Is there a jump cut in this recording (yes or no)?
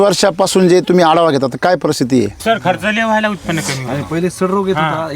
yes